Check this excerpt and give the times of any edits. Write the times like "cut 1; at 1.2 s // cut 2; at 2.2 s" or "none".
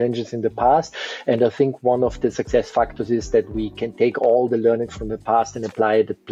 none